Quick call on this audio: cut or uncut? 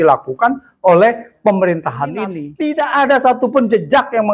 cut